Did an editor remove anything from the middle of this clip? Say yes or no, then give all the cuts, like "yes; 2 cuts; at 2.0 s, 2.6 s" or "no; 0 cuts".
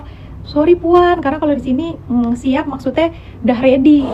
no; 0 cuts